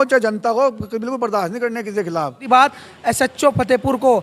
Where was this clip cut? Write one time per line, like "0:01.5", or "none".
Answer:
0:02.4